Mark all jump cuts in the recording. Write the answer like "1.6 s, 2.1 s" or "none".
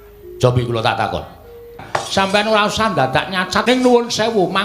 1.8 s, 3.6 s